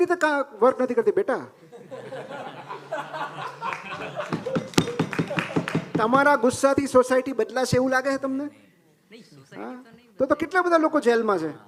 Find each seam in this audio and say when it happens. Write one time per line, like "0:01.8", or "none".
none